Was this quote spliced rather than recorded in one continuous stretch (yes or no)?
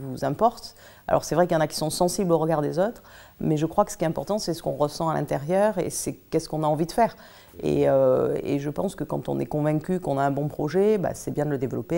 no